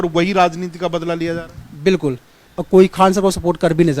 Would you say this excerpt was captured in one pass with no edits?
no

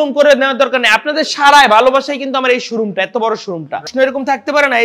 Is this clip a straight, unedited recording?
no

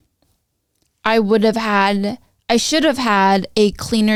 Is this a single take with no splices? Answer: yes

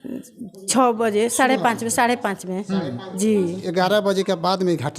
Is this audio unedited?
no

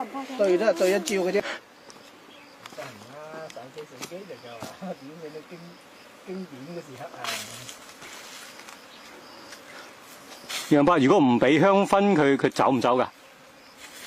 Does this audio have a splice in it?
yes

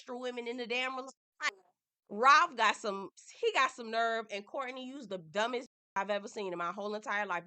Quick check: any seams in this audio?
yes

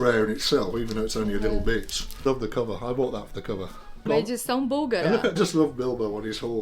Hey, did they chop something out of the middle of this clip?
yes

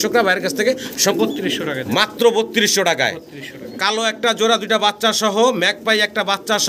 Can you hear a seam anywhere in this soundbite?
yes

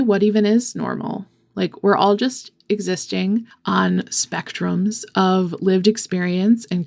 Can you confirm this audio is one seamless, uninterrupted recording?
yes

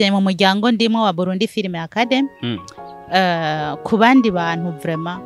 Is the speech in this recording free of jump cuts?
yes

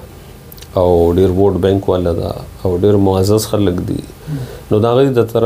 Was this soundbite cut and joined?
no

